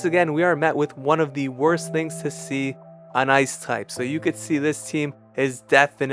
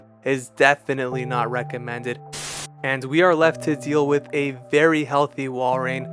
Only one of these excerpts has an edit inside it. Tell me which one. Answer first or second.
second